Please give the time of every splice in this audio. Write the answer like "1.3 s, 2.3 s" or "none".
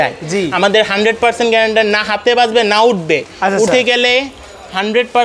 none